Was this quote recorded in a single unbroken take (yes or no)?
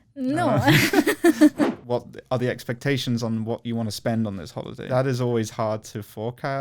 no